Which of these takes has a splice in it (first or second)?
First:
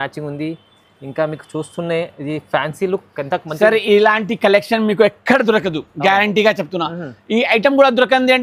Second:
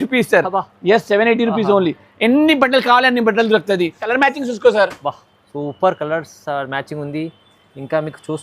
second